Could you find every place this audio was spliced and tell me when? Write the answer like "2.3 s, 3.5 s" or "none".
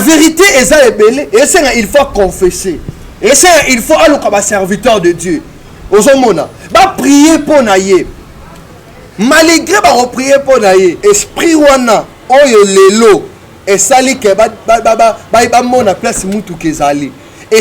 11.0 s

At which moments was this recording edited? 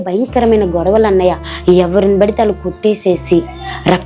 1.5 s

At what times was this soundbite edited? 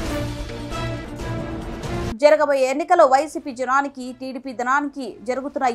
2.1 s

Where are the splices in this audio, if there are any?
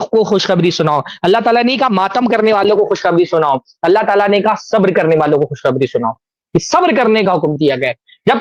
none

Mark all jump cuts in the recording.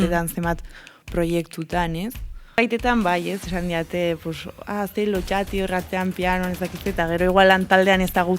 2.6 s

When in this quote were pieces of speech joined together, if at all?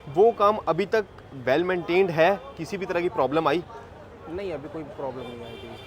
none

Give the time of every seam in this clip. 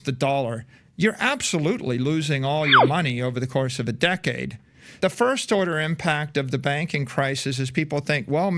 4.9 s

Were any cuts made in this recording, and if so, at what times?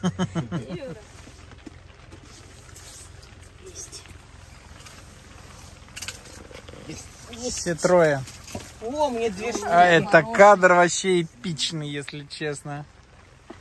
0.9 s

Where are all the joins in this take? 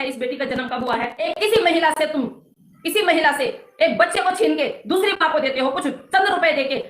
1.3 s

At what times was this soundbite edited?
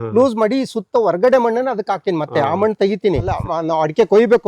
3.4 s

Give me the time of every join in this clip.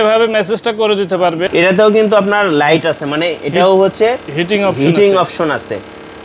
1.5 s

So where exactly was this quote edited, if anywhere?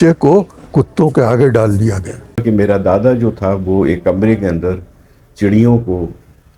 2.4 s

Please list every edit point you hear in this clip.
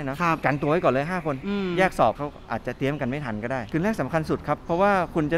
3.7 s

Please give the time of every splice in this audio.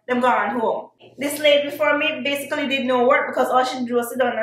0.9 s

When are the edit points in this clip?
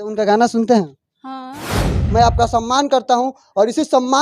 2.0 s

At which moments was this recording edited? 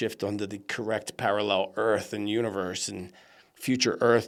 none

